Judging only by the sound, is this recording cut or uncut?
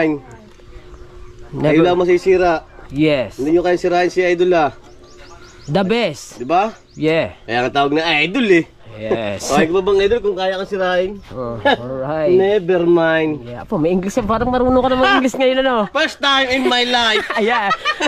uncut